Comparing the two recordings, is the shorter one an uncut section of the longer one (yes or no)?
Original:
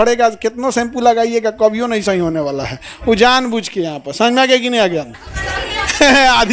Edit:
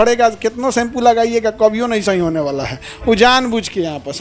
yes